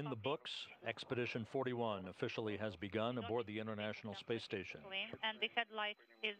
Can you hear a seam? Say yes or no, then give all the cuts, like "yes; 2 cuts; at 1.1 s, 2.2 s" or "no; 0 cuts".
yes; 1 cut; at 2.1 s